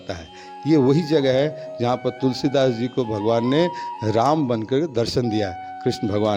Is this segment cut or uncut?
uncut